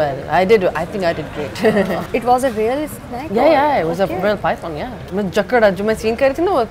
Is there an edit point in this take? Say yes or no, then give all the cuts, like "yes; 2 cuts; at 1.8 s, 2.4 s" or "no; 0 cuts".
yes; 2 cuts; at 2.0 s, 4.9 s